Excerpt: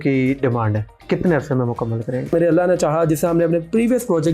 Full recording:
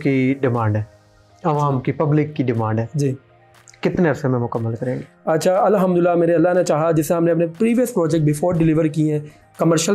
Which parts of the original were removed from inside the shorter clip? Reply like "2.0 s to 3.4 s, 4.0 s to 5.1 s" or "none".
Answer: 0.9 s to 3.6 s, 5.1 s to 6.2 s